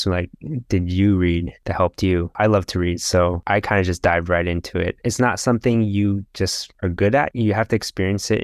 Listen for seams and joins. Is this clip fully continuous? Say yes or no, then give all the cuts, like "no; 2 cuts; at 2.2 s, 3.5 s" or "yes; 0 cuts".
no; 3 cuts; at 2.3 s, 5.0 s, 7.3 s